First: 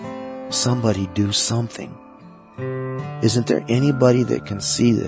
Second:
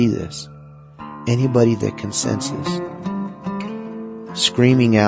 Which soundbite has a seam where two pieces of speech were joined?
second; 2 cuts; at 2.9 s, 4.2 s

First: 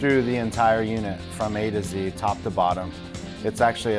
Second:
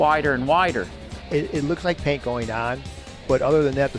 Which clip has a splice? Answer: second; 1 cut; at 1.1 s

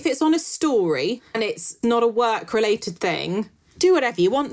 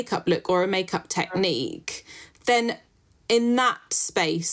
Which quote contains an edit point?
first; 2 cuts; at 1.8 s, 3.6 s

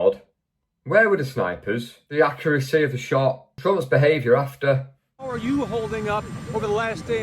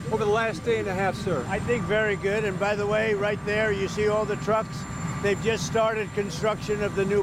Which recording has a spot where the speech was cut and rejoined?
first; 3 cuts; at 2.0 s, 3.5 s, 5.3 s

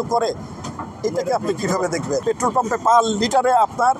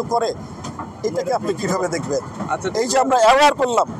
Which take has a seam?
first; 1 cut; at 2.2 s

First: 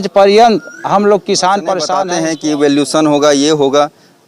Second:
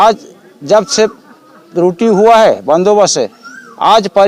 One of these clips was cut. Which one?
first; 1 cut; at 2.0 s

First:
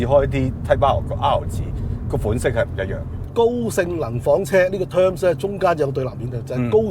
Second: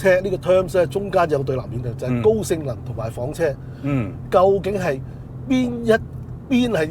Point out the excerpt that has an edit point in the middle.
first; 1 cut; at 3.2 s

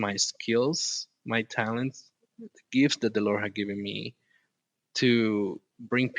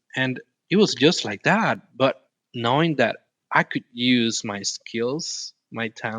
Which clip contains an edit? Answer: second; 1 cut; at 1.8 s

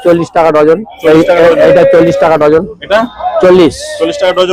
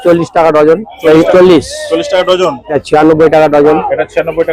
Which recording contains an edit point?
second; 2 cuts; at 1.3 s, 2.8 s

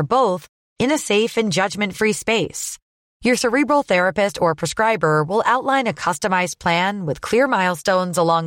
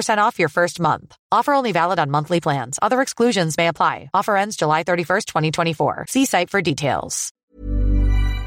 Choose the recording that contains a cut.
second; 1 cut; at 7.4 s

